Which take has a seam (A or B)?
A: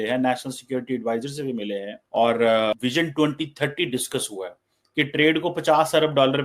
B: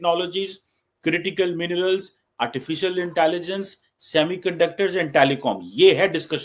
A